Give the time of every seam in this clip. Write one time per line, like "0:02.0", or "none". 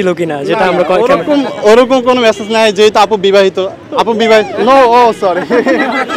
none